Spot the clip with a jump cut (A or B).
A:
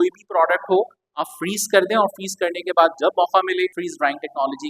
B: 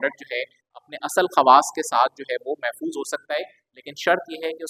A